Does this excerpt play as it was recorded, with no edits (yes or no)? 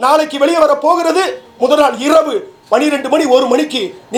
yes